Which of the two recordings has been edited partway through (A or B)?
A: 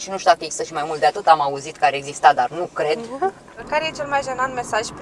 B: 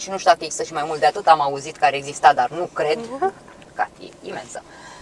A